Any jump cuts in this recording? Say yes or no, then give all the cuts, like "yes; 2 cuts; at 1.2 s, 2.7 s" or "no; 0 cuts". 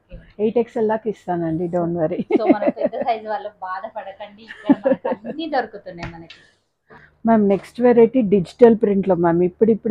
no; 0 cuts